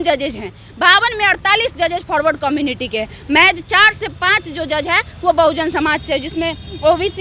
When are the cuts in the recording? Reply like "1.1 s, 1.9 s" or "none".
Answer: none